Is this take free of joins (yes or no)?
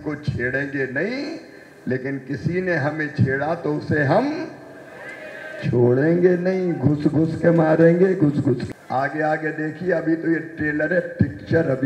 no